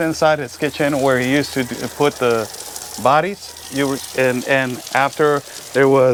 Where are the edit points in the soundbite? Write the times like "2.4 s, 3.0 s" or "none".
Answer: none